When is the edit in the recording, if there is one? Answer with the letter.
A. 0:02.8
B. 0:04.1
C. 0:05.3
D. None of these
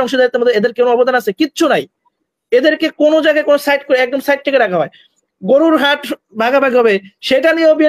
D